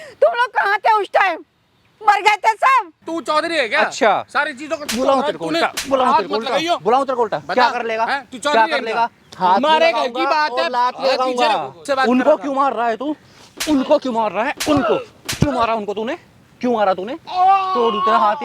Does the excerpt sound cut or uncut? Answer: cut